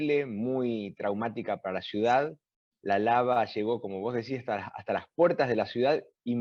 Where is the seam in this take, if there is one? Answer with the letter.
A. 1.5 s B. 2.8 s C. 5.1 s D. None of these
D